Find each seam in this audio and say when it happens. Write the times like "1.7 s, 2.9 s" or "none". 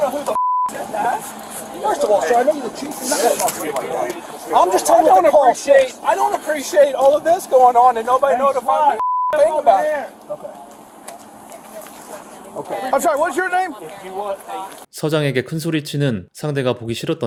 none